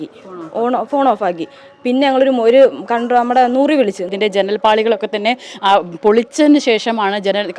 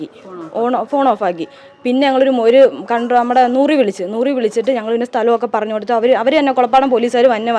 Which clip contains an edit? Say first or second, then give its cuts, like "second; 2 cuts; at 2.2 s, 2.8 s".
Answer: first; 1 cut; at 4.1 s